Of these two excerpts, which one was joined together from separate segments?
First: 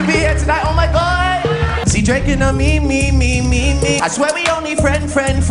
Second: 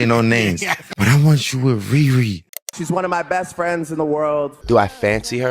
second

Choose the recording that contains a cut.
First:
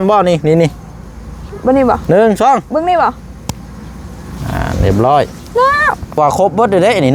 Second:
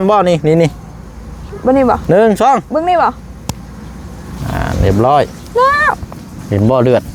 first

